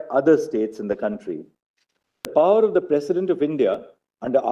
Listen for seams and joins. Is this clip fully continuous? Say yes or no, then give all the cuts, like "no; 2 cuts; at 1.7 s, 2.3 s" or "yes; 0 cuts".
no; 1 cut; at 2.3 s